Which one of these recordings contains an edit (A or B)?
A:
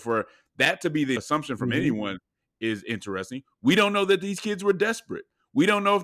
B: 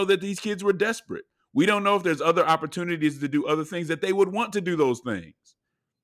A